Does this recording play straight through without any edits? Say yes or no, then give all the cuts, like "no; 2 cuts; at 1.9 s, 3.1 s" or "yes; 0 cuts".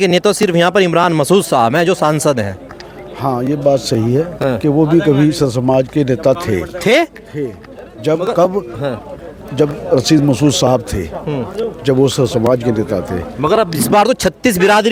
yes; 0 cuts